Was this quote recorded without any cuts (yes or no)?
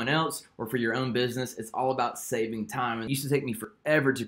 no